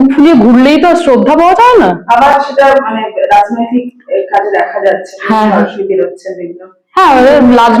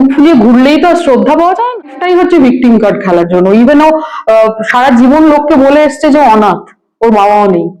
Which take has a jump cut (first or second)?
second